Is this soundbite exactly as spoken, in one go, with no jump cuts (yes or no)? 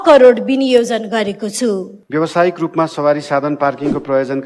no